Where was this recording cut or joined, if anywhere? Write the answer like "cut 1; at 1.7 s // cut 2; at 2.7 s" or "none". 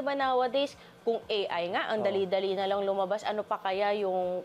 none